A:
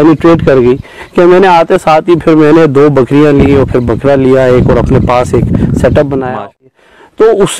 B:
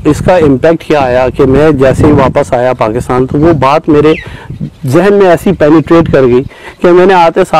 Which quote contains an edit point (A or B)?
A